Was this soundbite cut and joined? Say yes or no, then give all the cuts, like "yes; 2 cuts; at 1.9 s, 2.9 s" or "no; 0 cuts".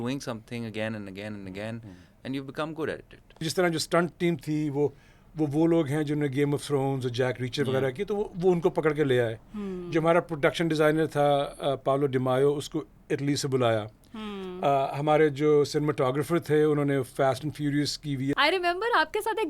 yes; 2 cuts; at 3.4 s, 18.3 s